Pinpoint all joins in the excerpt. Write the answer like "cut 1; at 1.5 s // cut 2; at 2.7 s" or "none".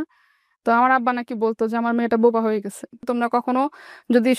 cut 1; at 3.0 s